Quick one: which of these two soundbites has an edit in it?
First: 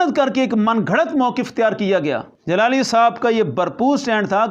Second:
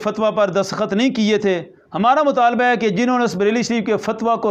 first; 1 cut; at 2.3 s

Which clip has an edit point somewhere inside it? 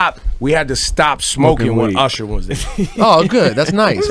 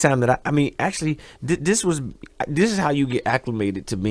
second; 1 cut; at 1.8 s

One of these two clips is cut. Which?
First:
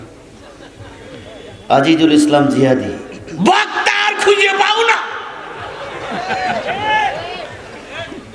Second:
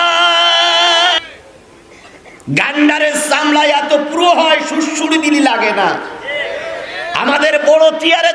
second; 1 cut; at 1.2 s

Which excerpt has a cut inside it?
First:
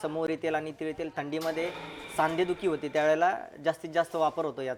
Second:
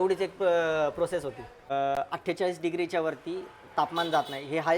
second; 1 cut; at 1.5 s

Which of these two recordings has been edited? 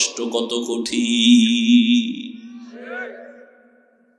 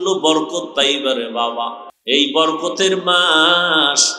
second; 1 cut; at 1.9 s

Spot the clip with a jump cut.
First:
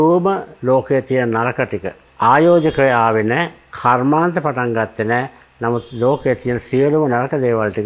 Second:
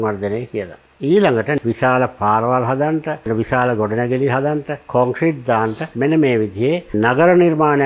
second; 5 cuts; at 0.9 s, 1.9 s, 3.3 s, 4.8 s, 5.8 s

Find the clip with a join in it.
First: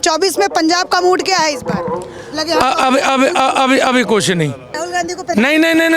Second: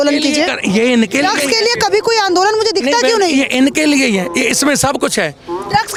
first; 1 cut; at 4.8 s

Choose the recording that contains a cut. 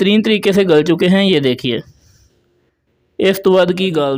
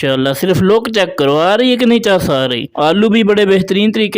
second; 1 cut; at 2.6 s

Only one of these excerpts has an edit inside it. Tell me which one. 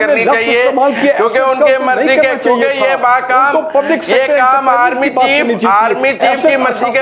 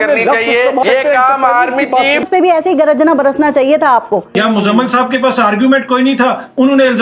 second; 3 cuts; at 0.8 s, 2.3 s, 4.3 s

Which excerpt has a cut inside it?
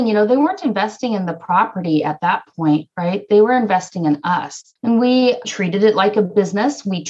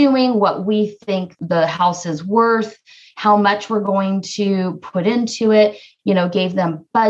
first; 1 cut; at 5.5 s

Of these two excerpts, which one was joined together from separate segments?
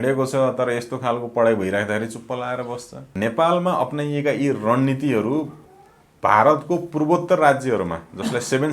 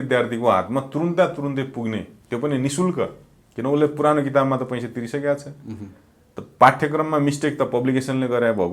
first; 1 cut; at 3.1 s

